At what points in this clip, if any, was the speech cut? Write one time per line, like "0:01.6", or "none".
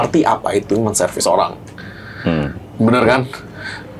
none